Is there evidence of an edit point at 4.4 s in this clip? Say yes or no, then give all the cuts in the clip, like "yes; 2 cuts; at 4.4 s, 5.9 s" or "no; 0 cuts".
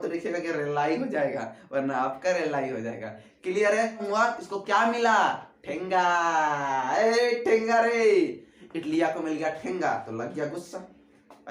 yes; 1 cut; at 4.4 s